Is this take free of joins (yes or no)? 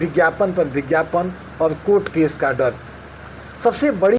yes